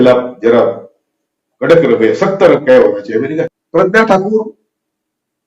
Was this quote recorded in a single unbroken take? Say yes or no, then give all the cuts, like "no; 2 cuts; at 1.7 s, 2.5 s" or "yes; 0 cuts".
no; 1 cut; at 3.4 s